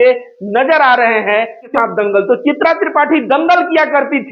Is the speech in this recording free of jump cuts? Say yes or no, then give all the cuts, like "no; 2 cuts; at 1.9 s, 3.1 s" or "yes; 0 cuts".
no; 1 cut; at 1.7 s